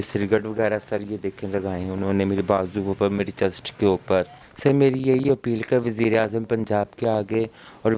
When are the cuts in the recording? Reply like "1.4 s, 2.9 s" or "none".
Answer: 4.4 s